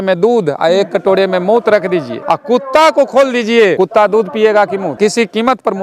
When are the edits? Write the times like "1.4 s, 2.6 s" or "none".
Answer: 2.1 s, 3.7 s, 4.9 s